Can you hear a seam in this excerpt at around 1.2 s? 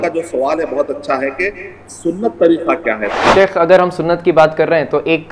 no; 1 cut; at 3.1 s

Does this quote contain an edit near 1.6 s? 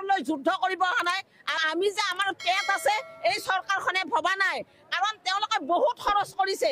yes; 1 cut; at 1.6 s

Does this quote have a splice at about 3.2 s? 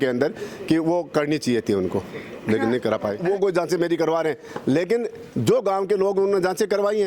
yes; 1 cut; at 3.2 s

